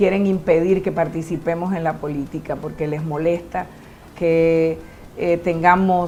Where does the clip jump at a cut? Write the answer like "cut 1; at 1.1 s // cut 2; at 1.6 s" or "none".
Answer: none